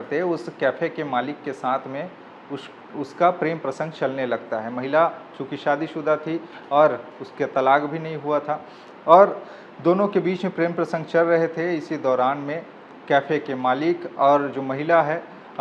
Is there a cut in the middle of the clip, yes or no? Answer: no